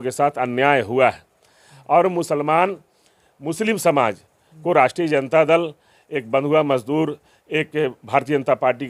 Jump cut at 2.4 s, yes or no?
no